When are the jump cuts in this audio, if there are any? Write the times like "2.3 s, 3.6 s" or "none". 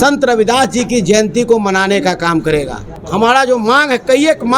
3.0 s